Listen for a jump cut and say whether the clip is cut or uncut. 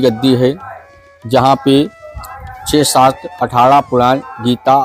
uncut